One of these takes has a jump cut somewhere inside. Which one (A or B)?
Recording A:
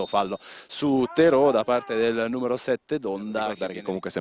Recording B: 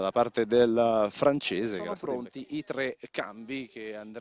A